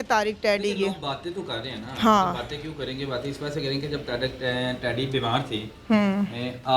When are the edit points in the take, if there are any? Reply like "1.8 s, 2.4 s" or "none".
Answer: none